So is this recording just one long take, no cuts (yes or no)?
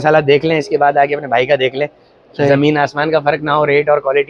yes